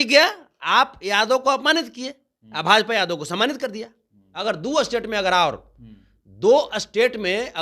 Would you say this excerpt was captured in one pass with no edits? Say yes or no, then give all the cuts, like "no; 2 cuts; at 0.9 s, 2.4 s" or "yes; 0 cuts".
no; 1 cut; at 4.3 s